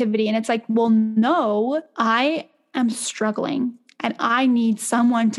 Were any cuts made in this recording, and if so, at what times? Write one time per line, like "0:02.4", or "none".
0:01.9